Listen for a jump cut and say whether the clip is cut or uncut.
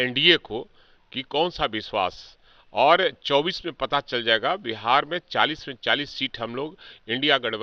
uncut